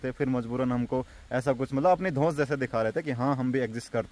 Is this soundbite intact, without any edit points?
yes; 0 cuts

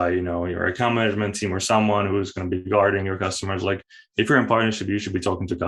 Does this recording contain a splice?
no; 0 cuts

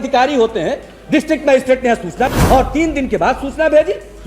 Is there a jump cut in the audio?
yes; 1 cut; at 2.3 s

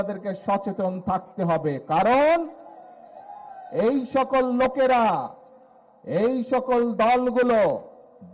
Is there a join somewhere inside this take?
no; 0 cuts

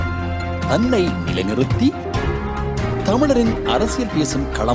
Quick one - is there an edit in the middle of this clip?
no; 0 cuts

